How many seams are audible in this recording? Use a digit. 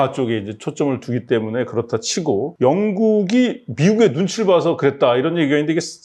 1